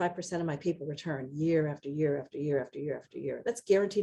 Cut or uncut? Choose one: uncut